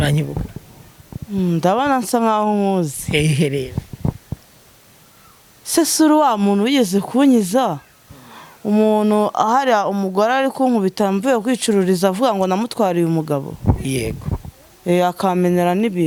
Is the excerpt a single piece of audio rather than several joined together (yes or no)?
yes